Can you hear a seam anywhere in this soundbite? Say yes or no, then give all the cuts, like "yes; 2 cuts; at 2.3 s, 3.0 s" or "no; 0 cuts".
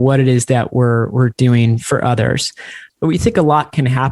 yes; 1 cut; at 2.8 s